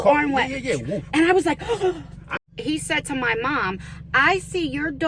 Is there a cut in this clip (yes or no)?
yes